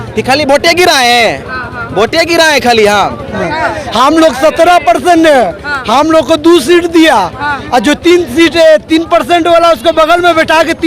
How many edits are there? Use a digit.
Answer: 1